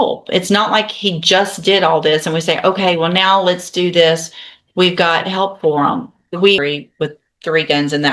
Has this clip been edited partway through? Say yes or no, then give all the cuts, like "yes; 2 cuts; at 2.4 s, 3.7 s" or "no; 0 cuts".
yes; 1 cut; at 6.6 s